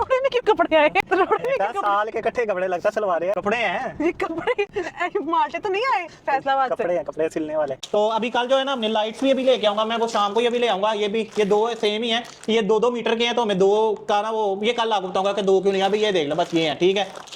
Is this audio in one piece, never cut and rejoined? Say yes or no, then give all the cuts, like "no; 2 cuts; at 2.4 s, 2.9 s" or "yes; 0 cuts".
no; 1 cut; at 7.8 s